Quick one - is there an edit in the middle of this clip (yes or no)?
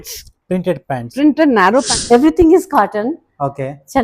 yes